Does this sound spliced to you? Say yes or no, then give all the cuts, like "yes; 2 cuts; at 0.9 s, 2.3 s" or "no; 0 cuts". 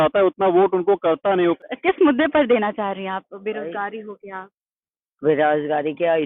yes; 1 cut; at 1.6 s